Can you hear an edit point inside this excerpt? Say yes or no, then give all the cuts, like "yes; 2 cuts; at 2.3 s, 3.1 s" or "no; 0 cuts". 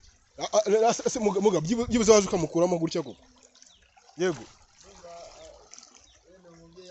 no; 0 cuts